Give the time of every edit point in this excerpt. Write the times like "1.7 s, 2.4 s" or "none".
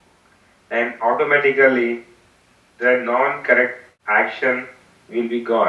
3.9 s